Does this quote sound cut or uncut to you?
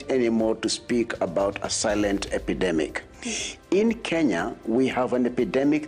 uncut